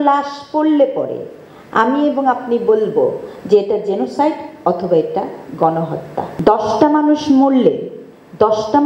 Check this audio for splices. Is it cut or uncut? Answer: cut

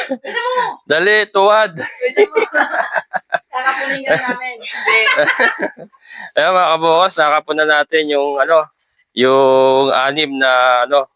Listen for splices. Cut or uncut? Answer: uncut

